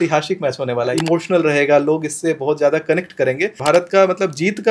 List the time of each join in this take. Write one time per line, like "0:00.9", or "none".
0:00.9
0:03.6